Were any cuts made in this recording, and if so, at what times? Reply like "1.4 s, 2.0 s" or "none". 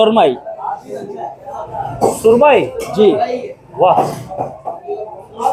none